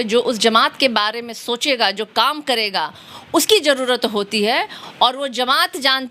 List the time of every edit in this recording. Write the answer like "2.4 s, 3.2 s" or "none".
none